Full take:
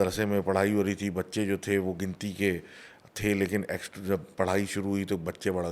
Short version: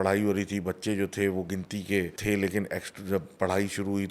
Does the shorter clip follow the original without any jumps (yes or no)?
no